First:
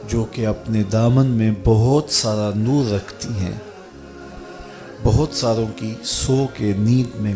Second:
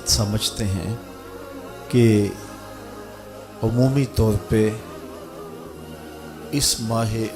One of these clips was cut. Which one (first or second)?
second